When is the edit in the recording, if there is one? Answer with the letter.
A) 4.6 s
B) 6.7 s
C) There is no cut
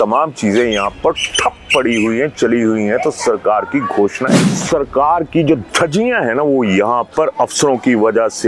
A